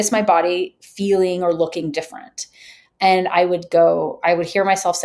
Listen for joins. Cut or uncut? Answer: uncut